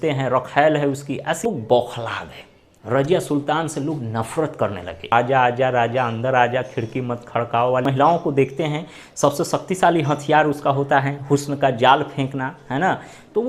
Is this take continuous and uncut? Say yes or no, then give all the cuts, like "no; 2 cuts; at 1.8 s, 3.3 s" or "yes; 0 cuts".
no; 3 cuts; at 1.4 s, 5.1 s, 7.8 s